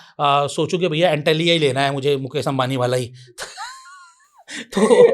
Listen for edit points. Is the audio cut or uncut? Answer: uncut